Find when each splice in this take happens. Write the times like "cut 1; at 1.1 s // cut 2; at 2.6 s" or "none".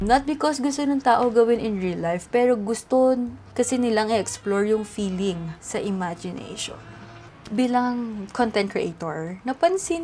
cut 1; at 3.0 s // cut 2; at 5.5 s // cut 3; at 7.2 s